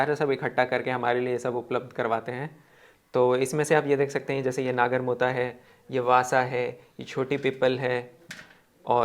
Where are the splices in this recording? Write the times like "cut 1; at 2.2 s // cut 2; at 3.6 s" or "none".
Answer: none